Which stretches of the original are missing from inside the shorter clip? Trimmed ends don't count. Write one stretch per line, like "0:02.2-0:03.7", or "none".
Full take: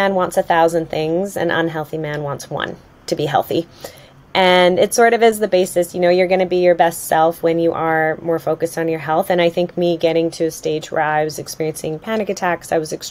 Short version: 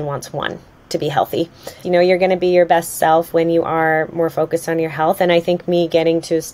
0:04.0-0:05.9